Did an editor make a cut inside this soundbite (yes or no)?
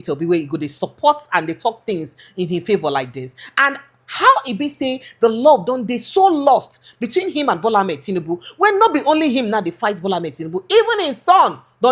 no